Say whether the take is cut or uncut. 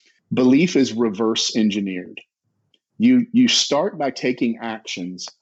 uncut